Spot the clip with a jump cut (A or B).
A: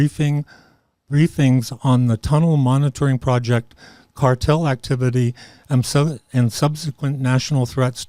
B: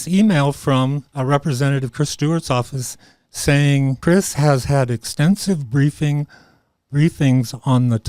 B